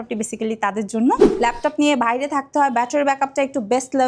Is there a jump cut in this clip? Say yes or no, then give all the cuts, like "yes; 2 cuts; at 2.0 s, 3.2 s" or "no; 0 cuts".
yes; 1 cut; at 1.3 s